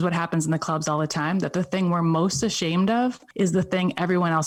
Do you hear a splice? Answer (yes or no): no